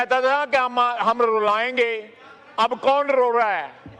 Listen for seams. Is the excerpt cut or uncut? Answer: uncut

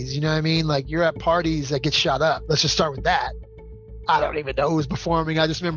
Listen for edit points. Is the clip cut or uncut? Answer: cut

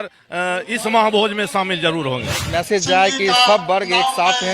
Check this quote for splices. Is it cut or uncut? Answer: cut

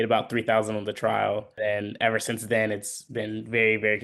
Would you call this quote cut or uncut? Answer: cut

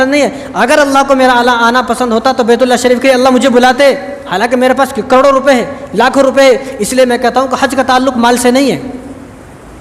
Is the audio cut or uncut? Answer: uncut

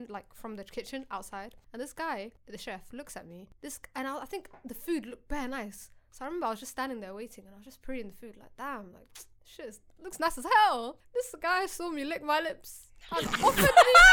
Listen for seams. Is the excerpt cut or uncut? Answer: cut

